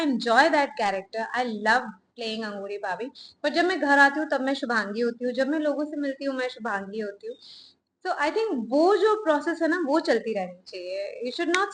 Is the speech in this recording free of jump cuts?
yes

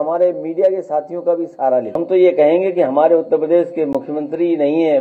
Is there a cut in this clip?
yes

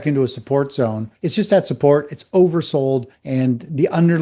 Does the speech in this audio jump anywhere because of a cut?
yes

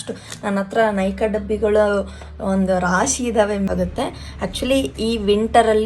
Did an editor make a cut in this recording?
yes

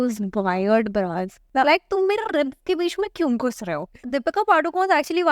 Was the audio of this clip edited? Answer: yes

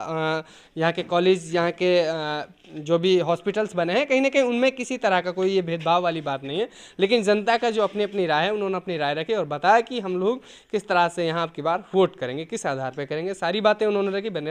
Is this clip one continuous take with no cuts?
yes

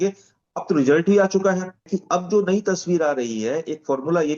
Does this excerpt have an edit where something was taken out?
yes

